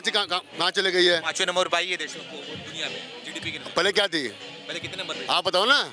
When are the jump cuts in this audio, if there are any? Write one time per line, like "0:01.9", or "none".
none